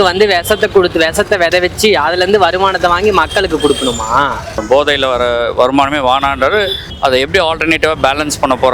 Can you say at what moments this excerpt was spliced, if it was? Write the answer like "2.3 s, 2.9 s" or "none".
4.6 s, 6.8 s